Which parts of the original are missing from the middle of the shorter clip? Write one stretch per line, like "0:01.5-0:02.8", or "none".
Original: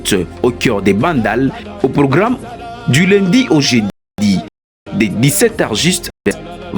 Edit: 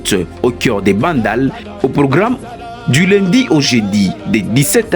0:04.0-0:04.7

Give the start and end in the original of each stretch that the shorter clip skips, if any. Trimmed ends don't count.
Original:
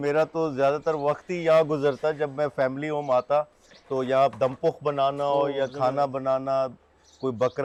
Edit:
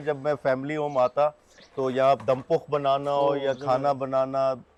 none

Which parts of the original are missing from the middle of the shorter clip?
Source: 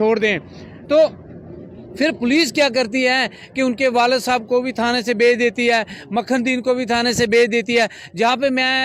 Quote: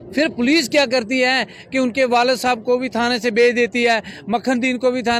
none

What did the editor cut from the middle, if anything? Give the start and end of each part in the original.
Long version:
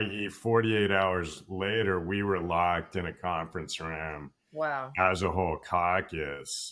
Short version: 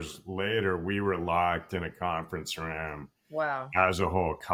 none

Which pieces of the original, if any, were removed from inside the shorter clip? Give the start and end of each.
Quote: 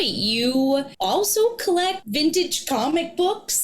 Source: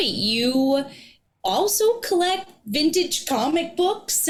0:00.9-0:01.4
0:02.5-0:02.6

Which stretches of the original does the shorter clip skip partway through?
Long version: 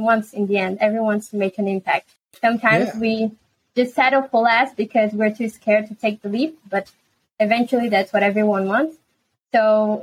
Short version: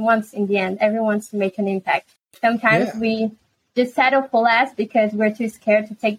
none

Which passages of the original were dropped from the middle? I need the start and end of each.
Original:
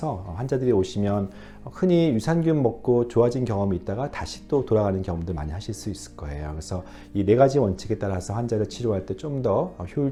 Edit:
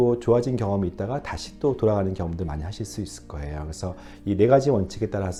none

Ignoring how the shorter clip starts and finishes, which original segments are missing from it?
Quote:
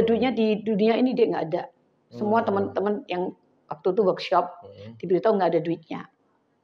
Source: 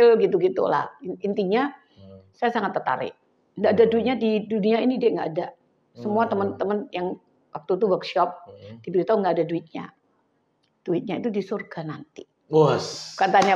none

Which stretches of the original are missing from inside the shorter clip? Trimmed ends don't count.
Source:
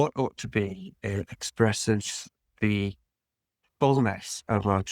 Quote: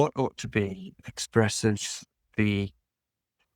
0:01.0-0:01.2

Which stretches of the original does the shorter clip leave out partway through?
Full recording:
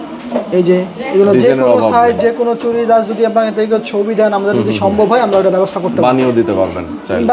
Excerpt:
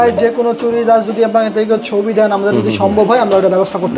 none

